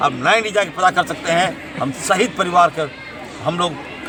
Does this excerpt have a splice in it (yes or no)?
no